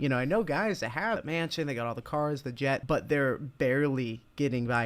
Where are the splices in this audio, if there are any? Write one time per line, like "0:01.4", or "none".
0:01.2
0:02.8